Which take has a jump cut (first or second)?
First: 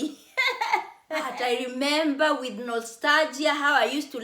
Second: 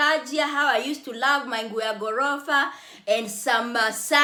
first